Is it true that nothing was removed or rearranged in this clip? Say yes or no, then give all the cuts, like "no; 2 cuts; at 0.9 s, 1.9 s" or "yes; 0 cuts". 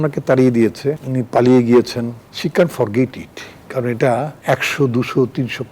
no; 3 cuts; at 1.0 s, 2.2 s, 4.4 s